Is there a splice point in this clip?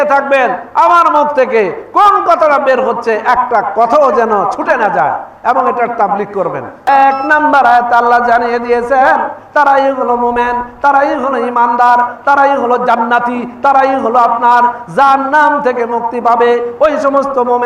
yes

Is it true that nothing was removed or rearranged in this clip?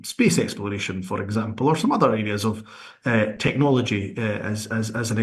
yes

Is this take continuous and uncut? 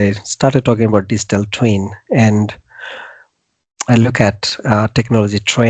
yes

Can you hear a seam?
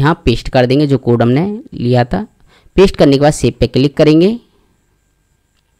no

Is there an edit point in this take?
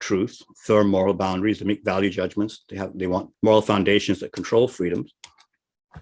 yes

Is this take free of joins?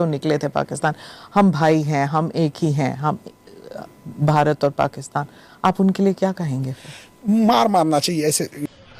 yes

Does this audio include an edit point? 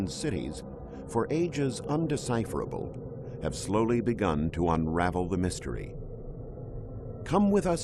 no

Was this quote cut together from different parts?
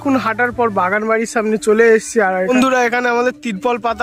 yes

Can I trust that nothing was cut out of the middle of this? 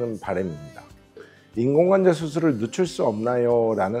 no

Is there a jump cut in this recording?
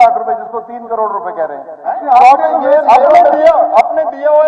yes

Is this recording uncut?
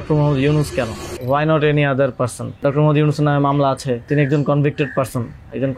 no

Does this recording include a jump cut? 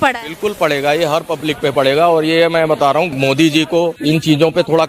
yes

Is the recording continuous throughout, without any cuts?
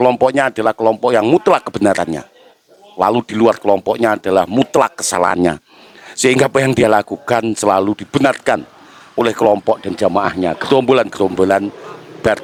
yes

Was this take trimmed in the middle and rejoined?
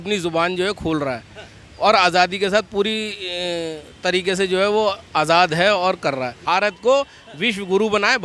yes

